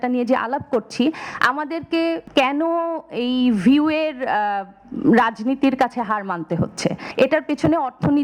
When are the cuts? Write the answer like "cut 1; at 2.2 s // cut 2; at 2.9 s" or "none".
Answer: cut 1; at 2.2 s // cut 2; at 7.0 s